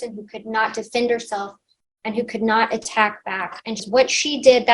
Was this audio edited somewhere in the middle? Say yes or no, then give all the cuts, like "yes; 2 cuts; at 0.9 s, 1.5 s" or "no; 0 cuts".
yes; 1 cut; at 3.8 s